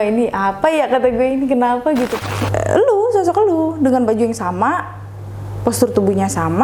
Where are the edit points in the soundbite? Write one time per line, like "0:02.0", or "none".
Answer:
0:02.2